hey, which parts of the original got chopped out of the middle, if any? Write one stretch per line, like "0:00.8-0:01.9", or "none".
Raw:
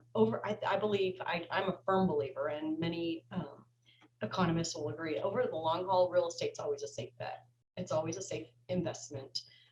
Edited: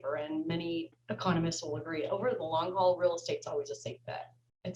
0:03.3-0:04.1